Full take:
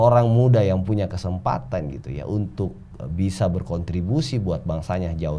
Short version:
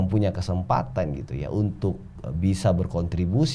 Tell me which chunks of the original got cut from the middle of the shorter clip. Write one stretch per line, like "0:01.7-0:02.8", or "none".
none